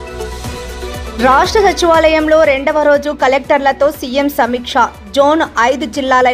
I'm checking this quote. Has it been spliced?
yes; 1 cut; at 1.1 s

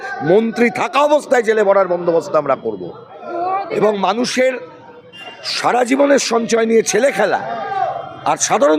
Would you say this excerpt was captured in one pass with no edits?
yes; 0 cuts

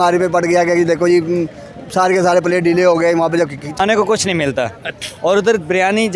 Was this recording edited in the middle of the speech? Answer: yes; 1 cut; at 3.7 s

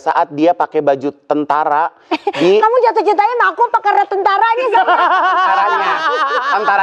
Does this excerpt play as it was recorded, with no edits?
yes; 0 cuts

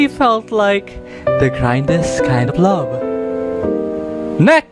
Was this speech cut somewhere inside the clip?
yes; 1 cut; at 2.5 s

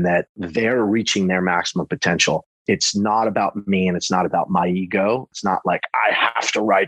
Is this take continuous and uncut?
no; 1 cut; at 5.3 s

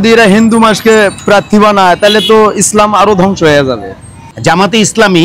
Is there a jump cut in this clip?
yes; 1 cut; at 4.2 s

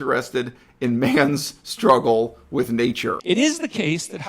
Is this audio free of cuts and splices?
no; 1 cut; at 3.2 s

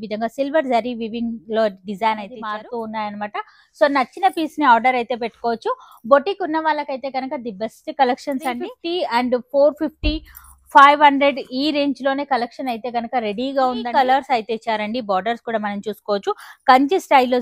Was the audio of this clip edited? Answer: yes; 3 cuts; at 2.4 s, 8.7 s, 13.8 s

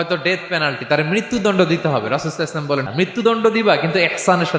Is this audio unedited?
no; 1 cut; at 2.9 s

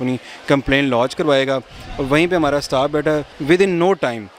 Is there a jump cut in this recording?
yes; 1 cut; at 3.3 s

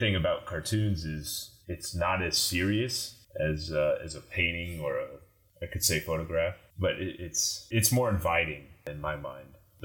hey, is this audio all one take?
yes; 0 cuts

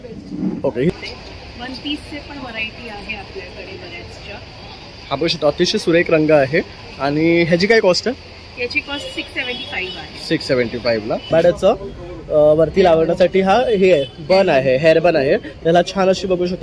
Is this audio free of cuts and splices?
no; 2 cuts; at 0.9 s, 11.2 s

